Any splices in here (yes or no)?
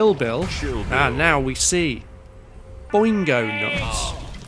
yes